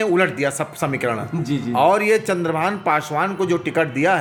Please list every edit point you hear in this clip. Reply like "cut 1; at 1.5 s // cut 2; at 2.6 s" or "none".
none